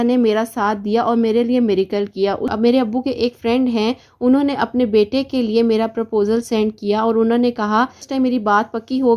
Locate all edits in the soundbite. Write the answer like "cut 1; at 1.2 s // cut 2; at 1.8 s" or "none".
cut 1; at 2.5 s // cut 2; at 8.0 s